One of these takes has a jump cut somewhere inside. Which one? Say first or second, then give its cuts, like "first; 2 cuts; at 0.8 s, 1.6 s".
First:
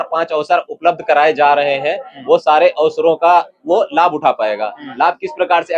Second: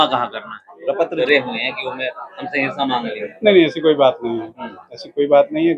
second; 1 cut; at 1.2 s